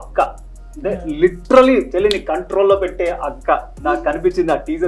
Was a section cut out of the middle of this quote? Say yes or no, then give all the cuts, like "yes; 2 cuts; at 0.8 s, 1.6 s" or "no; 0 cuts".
no; 0 cuts